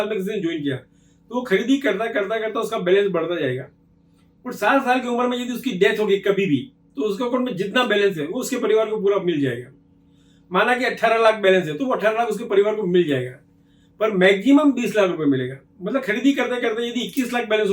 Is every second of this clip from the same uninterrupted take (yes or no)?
yes